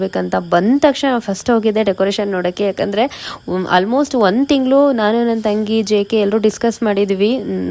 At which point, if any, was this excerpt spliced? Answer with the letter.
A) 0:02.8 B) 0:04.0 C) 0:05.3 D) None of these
D